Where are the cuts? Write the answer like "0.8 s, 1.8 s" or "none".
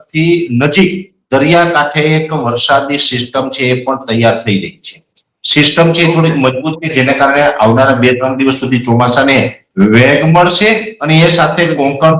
none